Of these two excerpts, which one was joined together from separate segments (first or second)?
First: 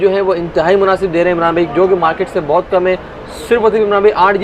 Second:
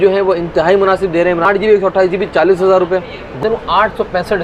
second